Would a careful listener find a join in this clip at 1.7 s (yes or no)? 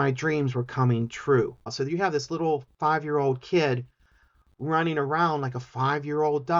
yes